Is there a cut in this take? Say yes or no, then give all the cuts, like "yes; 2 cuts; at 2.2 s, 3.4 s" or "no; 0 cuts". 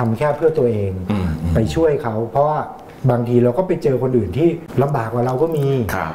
no; 0 cuts